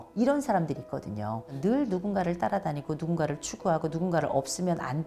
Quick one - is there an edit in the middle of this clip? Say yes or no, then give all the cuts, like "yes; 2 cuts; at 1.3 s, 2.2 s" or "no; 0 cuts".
yes; 1 cut; at 1.5 s